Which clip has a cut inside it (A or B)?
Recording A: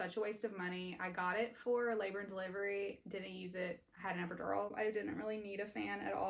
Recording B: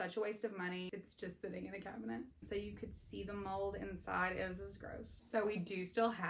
B